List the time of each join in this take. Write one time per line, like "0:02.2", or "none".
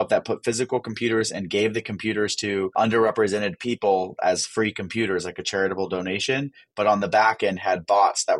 0:02.7